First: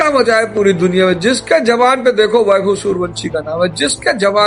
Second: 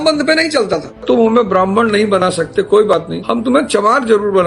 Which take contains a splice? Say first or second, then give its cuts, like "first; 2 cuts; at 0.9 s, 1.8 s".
second; 2 cuts; at 1.0 s, 3.2 s